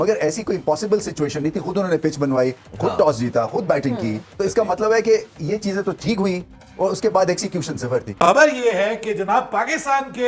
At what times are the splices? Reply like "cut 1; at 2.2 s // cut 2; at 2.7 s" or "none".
cut 1; at 8.2 s